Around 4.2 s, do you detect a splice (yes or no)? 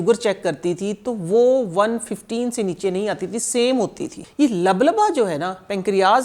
yes